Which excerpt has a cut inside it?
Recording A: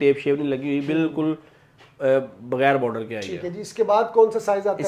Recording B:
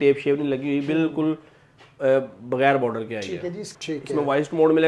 B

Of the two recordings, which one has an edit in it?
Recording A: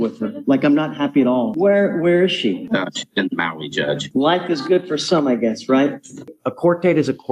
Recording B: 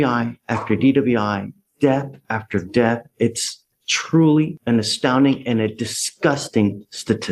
A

